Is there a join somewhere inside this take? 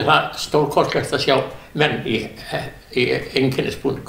no; 0 cuts

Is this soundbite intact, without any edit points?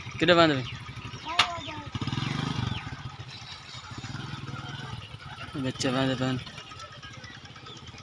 yes; 0 cuts

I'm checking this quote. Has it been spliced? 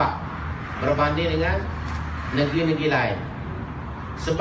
no; 0 cuts

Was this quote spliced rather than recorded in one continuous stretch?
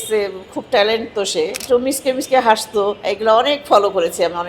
yes; 2 cuts; at 1.6 s, 3.0 s

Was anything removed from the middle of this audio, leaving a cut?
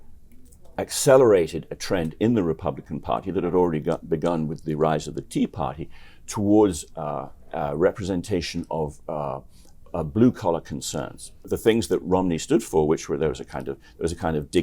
yes; 1 cut; at 11.5 s

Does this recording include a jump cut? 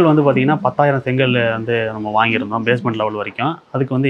no; 0 cuts

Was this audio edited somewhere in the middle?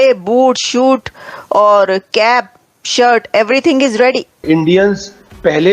yes; 1 cut; at 4.4 s

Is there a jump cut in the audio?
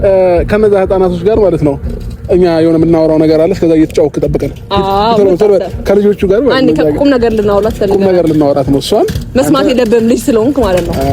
no; 0 cuts

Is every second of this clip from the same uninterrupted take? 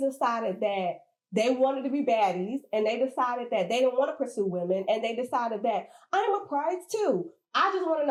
yes; 0 cuts

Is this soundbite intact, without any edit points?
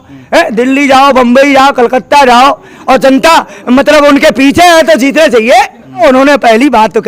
no; 2 cuts; at 2.7 s, 6.0 s

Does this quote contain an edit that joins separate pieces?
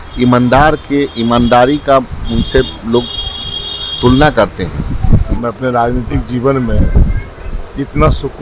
yes; 1 cut; at 5.4 s

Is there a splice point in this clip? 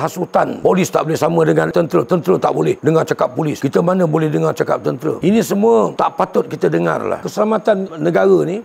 no; 0 cuts

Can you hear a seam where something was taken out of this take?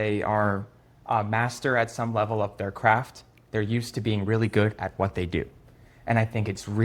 no; 0 cuts

